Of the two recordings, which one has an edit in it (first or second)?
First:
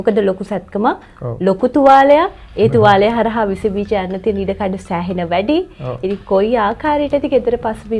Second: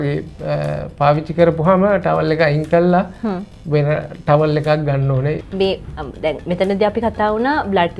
second